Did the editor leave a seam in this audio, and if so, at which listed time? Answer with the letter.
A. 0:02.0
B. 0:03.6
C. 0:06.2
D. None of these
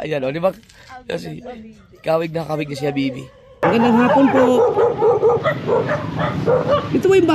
B